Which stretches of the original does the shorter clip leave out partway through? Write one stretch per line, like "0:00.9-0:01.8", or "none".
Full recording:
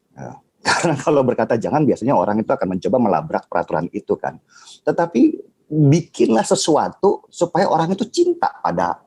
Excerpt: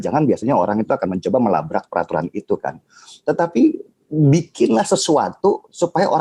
none